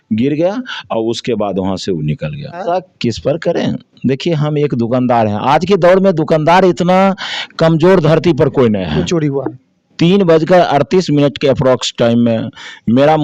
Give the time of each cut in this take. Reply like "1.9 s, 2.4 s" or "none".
2.6 s, 9.1 s